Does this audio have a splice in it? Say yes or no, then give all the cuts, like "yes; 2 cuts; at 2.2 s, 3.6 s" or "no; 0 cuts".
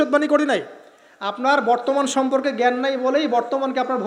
no; 0 cuts